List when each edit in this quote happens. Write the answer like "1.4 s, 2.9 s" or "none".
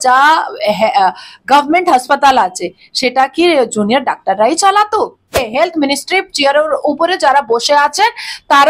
5.5 s